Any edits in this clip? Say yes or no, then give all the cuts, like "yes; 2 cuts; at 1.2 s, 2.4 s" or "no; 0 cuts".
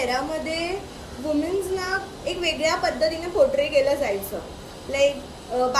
no; 0 cuts